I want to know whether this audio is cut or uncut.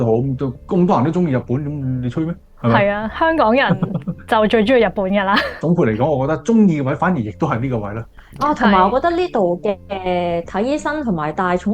uncut